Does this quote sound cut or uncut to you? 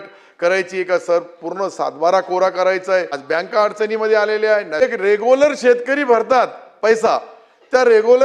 cut